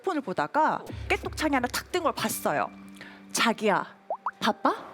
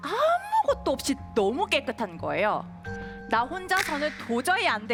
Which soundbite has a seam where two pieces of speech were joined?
first; 1 cut; at 1.0 s

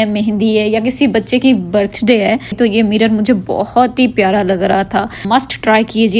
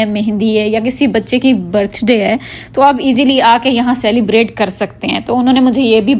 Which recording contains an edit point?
first; 2 cuts; at 2.5 s, 5.2 s

